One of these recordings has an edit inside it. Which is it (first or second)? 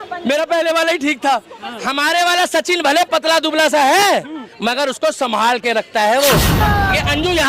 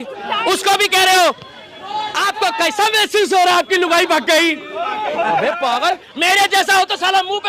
first